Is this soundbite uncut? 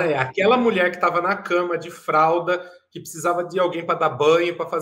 yes; 0 cuts

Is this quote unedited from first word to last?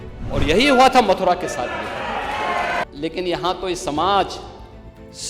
no; 1 cut; at 2.8 s

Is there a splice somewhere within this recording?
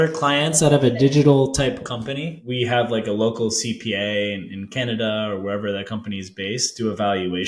no; 0 cuts

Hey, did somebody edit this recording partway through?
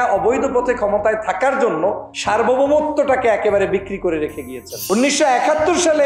yes; 2 cuts; at 2.1 s, 4.7 s

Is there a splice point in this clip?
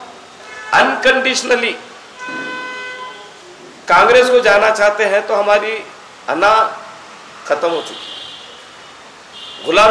no; 0 cuts

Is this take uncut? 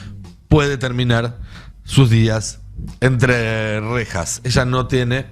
yes; 0 cuts

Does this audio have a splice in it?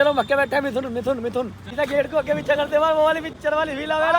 yes; 2 cuts; at 1.6 s, 3.3 s

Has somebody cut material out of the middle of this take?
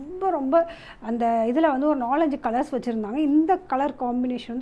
no; 0 cuts

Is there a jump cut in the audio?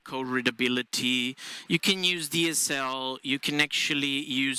no; 0 cuts

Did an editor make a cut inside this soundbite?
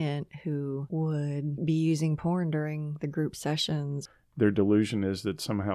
yes; 2 cuts; at 1.0 s, 4.0 s

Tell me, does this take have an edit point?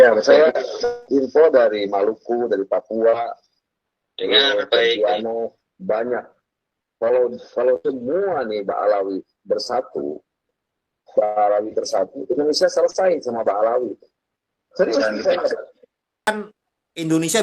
yes; 1 cut; at 16.5 s

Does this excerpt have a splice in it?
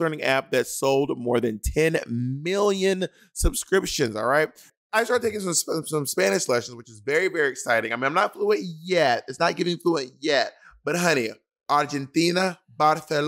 yes; 1 cut; at 4.7 s

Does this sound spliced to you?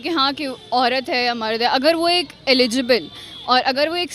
no; 0 cuts

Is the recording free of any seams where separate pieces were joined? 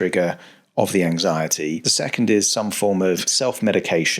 no; 2 cuts; at 1.9 s, 3.3 s

